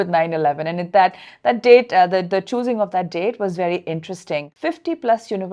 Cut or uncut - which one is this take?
cut